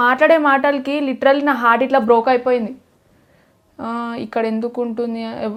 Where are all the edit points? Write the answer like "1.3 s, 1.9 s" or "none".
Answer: none

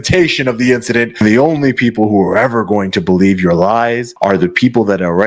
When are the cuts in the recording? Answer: 1.2 s, 4.1 s

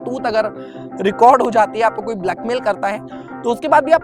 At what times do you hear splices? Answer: none

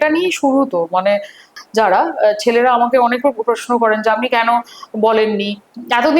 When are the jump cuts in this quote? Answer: 1.5 s

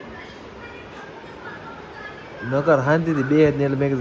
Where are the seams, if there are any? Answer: none

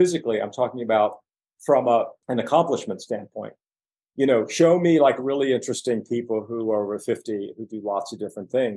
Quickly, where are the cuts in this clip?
2.2 s

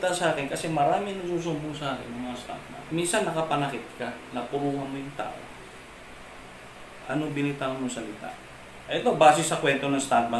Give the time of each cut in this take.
none

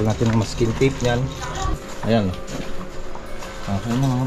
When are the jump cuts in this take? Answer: 1.8 s

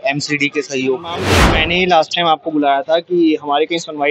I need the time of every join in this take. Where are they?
1.3 s

